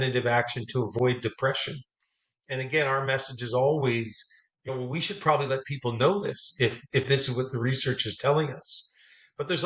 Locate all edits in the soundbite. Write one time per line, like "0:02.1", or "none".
none